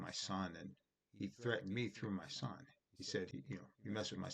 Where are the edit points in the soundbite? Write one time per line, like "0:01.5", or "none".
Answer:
0:03.3